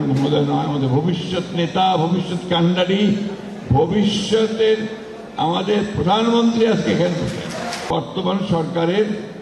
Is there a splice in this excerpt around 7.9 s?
yes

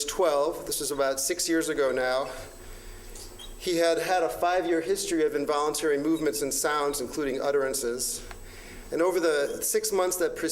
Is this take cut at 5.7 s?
no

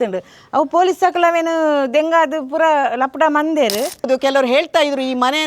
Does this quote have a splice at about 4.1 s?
yes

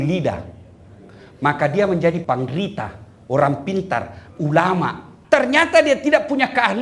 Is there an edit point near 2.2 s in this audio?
yes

